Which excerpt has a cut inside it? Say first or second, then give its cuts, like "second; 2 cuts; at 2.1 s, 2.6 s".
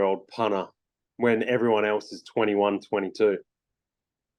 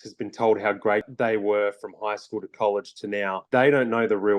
second; 2 cuts; at 1.1 s, 3.4 s